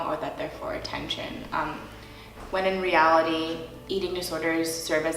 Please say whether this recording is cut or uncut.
cut